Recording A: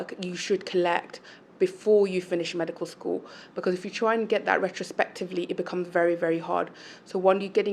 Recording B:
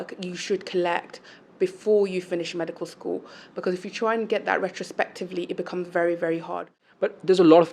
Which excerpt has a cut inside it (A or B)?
B